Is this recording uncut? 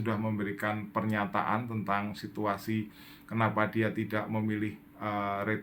yes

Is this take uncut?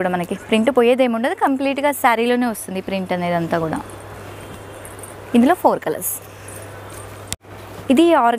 yes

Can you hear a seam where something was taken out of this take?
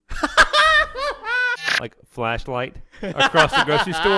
yes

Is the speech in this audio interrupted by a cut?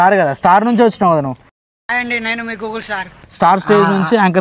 yes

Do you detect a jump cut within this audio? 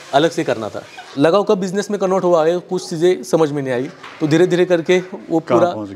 yes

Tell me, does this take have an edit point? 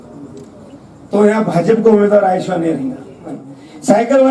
yes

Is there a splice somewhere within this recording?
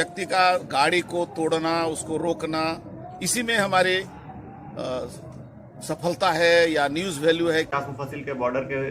yes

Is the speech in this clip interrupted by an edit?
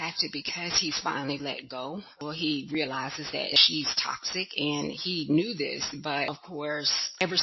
yes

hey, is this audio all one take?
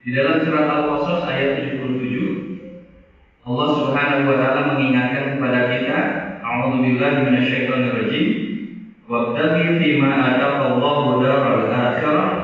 yes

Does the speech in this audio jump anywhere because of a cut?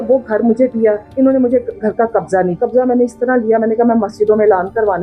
yes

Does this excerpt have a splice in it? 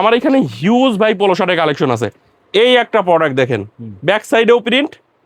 yes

